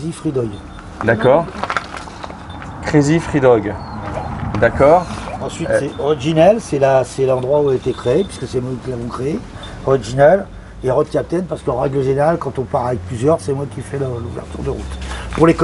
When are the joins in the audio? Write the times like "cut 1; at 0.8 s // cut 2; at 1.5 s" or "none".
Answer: none